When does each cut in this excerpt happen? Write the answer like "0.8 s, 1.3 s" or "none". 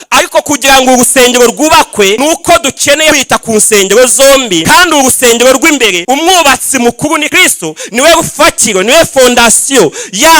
2.2 s, 3.2 s, 4.6 s, 6.0 s, 7.3 s